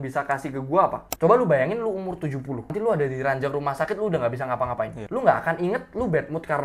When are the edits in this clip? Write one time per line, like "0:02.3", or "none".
0:01.1
0:02.7
0:05.0

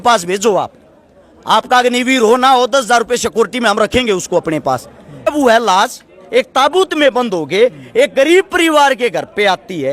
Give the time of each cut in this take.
0:05.3

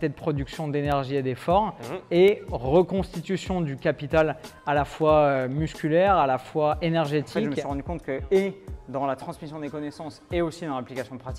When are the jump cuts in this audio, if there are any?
0:07.4

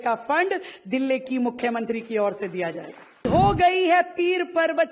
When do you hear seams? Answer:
0:03.2

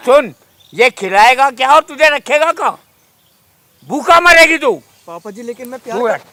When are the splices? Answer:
none

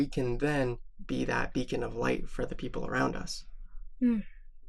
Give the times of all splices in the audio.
none

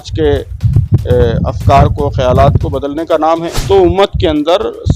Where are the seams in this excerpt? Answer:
0:03.5

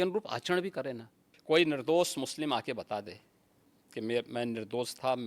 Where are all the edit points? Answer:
0:01.3

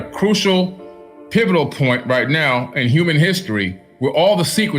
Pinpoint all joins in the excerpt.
0:03.8

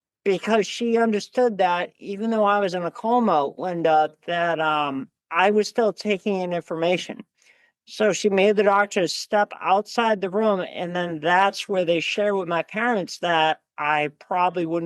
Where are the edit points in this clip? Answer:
none

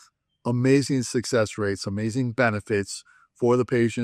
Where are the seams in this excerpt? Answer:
none

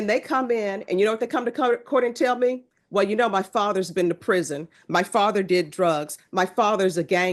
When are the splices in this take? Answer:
none

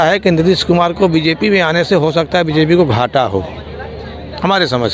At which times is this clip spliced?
none

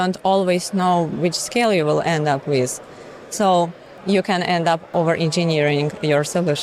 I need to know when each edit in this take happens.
0:03.9
0:04.9

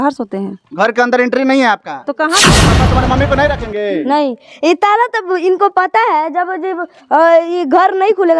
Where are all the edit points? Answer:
0:02.7

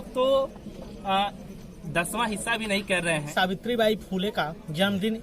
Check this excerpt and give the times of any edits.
0:03.3

